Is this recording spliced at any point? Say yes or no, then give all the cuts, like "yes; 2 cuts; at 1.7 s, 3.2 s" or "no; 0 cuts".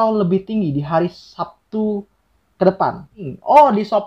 yes; 1 cut; at 3.1 s